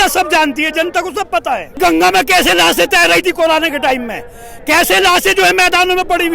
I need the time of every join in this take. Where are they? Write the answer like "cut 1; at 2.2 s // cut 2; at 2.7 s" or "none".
cut 1; at 1.8 s